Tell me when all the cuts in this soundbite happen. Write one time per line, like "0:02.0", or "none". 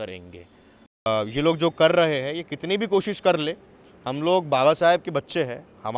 0:01.1